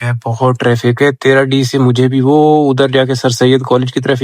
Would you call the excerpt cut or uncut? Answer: uncut